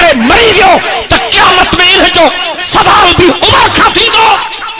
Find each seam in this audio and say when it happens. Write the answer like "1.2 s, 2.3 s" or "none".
none